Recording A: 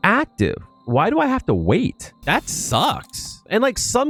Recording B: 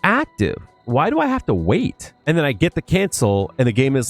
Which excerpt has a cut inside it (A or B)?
B